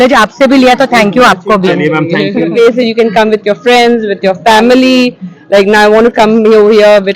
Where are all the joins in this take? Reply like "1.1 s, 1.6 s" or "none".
2.5 s